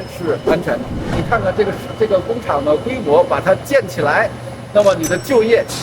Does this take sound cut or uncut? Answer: cut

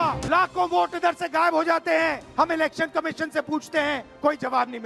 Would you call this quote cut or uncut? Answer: cut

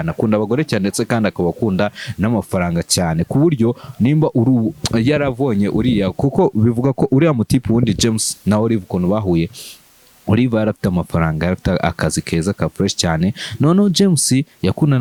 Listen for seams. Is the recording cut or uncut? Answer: uncut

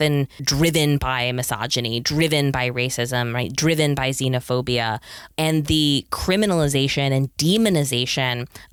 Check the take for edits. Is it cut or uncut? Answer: uncut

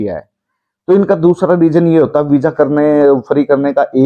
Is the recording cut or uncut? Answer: uncut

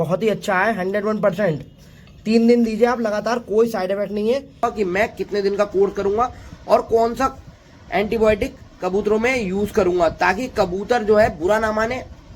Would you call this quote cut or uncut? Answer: cut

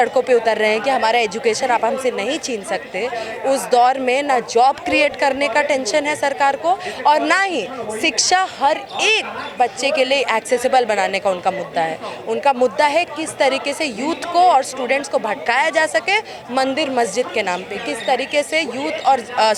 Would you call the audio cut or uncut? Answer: uncut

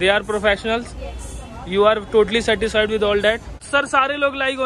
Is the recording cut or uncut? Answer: cut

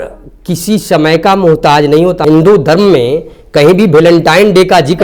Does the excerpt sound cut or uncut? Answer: cut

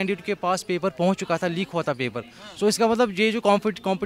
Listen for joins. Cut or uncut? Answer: uncut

